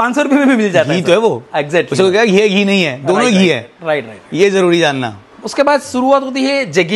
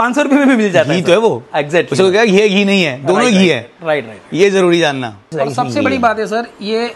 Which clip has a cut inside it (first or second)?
second